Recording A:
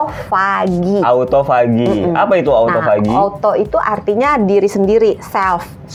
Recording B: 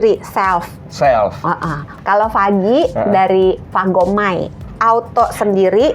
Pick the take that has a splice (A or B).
B